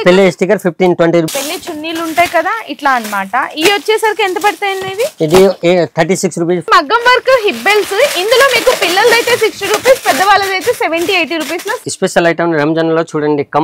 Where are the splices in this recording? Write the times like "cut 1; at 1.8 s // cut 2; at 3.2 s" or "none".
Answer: cut 1; at 1.3 s // cut 2; at 6.6 s // cut 3; at 11.8 s